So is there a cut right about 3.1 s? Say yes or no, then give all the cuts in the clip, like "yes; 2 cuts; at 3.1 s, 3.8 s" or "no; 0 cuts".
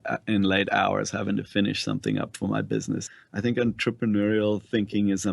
yes; 1 cut; at 3.1 s